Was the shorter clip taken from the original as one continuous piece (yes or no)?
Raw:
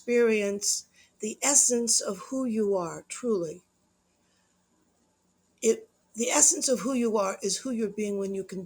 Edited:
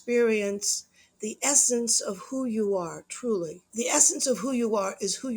no